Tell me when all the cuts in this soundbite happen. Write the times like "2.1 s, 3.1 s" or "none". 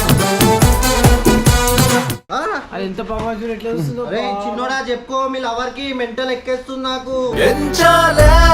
2.1 s